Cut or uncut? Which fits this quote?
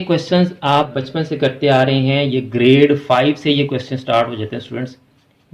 cut